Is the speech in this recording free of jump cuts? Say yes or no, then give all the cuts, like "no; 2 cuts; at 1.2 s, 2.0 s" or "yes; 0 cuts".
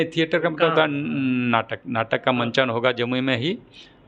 yes; 0 cuts